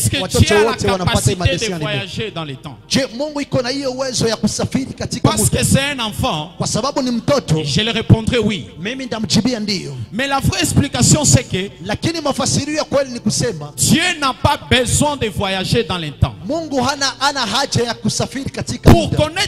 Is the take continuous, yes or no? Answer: yes